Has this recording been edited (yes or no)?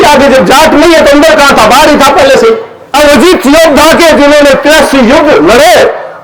yes